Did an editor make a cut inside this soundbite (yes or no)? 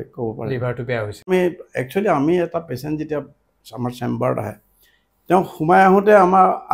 yes